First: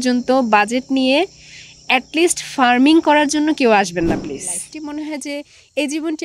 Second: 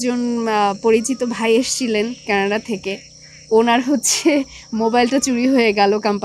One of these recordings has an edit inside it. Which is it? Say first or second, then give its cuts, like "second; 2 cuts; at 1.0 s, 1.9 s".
first; 1 cut; at 4.6 s